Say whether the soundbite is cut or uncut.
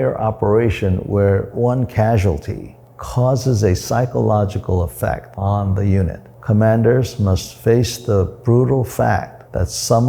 cut